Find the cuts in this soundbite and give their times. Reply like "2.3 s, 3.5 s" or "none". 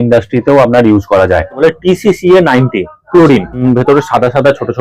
1.5 s, 3.6 s